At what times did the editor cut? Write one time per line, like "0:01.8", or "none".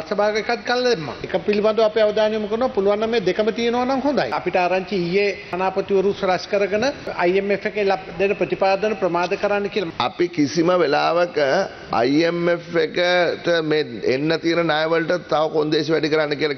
0:01.2
0:04.4
0:05.5
0:07.1
0:09.9